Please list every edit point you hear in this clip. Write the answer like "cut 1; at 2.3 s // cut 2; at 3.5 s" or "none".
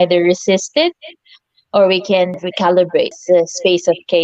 cut 1; at 2.4 s // cut 2; at 3.2 s